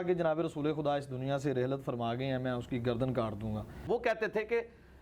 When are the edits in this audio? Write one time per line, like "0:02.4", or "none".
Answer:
0:03.7